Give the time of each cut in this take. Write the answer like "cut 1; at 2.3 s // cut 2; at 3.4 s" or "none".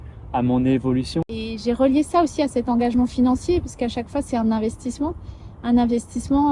cut 1; at 1.4 s